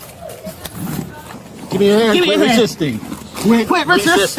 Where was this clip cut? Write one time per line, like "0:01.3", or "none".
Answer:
0:01.3